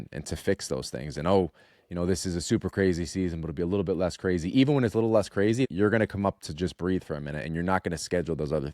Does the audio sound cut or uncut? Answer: cut